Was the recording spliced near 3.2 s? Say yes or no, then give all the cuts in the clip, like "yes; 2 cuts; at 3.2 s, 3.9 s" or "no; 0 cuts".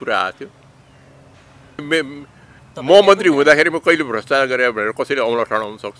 no; 1 cut; at 1.8 s